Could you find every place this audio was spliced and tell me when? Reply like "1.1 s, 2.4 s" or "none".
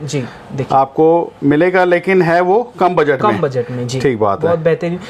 none